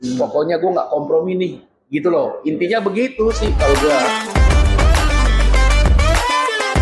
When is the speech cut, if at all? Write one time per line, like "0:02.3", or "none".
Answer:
0:04.0